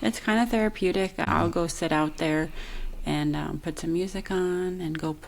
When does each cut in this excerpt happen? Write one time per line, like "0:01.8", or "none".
0:01.2